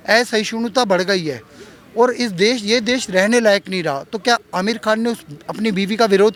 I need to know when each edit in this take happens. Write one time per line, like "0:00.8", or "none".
none